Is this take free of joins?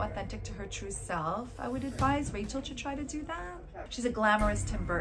no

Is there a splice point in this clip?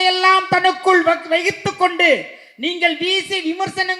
no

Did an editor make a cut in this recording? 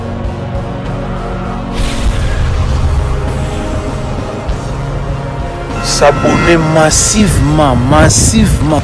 no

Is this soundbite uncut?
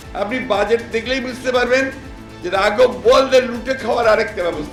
yes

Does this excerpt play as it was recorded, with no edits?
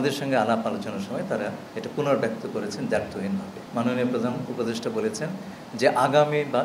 no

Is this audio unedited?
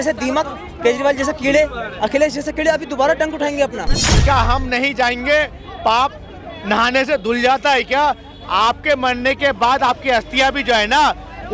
no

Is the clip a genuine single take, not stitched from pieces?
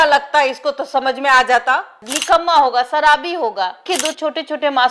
no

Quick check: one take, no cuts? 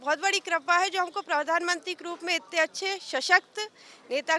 yes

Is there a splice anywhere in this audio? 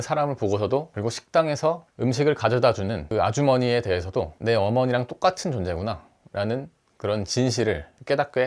yes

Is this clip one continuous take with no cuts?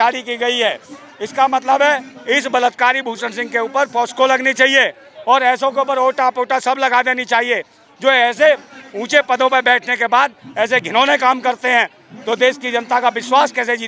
yes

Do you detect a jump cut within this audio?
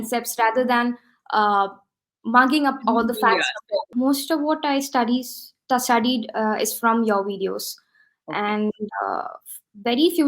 yes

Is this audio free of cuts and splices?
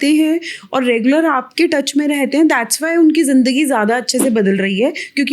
yes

